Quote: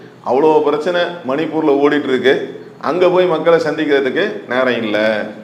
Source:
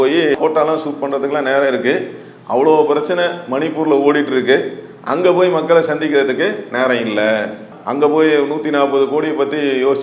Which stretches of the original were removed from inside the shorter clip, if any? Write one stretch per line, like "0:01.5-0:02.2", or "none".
none